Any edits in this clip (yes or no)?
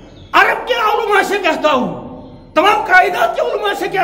no